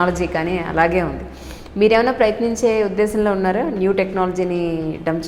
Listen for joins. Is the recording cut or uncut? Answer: uncut